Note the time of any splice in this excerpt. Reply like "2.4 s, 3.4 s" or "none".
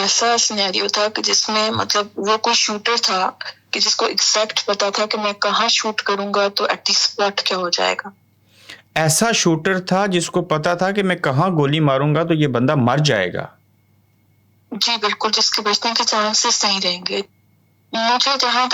17.3 s